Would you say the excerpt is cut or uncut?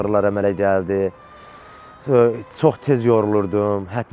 uncut